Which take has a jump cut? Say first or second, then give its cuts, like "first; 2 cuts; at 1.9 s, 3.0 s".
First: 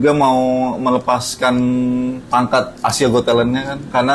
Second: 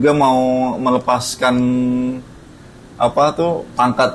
first; 1 cut; at 2.2 s